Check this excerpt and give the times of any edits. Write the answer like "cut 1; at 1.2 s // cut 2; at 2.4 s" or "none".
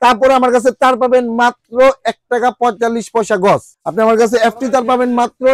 cut 1; at 3.7 s